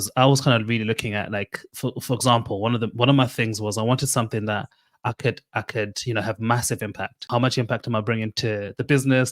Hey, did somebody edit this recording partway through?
yes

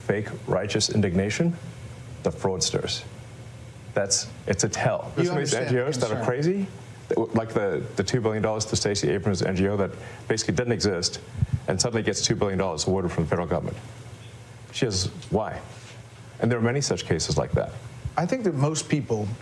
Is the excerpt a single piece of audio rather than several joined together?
yes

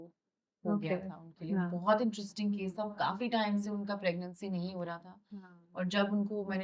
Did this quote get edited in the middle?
no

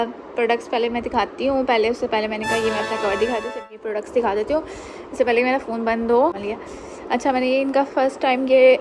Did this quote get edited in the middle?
yes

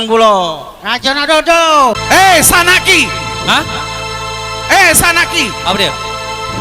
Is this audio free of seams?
no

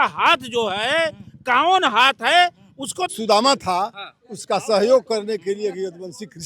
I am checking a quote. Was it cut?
yes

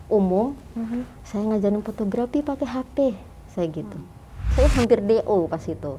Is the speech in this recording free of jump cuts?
no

